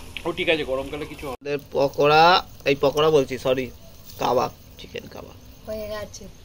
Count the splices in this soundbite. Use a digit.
1